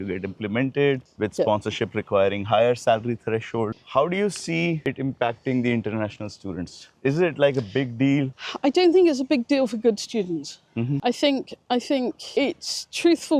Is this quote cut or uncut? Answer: uncut